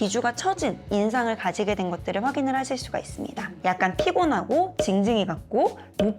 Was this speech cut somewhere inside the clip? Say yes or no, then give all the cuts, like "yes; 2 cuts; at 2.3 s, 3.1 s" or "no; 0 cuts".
yes; 1 cut; at 3.5 s